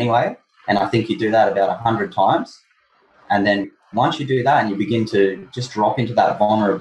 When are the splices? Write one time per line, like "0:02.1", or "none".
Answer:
0:03.6